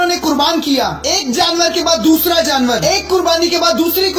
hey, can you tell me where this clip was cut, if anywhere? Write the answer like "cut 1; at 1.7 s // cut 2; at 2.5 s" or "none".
none